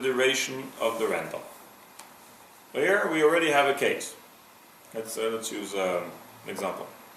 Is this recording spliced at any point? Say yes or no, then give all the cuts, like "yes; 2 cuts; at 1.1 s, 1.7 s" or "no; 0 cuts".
yes; 1 cut; at 4.0 s